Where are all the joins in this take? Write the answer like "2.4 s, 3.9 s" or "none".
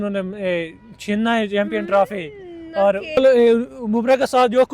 3.2 s